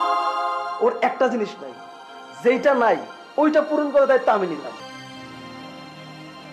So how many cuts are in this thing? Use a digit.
1